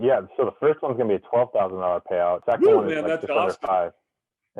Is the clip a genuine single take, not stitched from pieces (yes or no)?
no